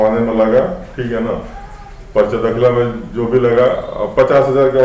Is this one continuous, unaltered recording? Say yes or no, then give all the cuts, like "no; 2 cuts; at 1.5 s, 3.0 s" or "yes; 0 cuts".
yes; 0 cuts